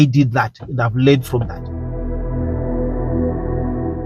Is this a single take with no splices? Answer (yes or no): yes